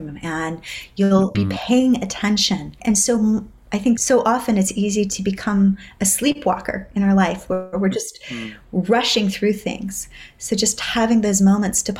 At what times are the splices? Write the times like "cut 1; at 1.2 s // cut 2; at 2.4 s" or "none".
cut 1; at 1.3 s // cut 2; at 2.8 s // cut 3; at 4.0 s